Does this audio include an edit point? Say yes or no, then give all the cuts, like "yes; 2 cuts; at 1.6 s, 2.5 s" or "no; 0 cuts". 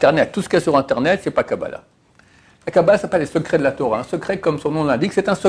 no; 0 cuts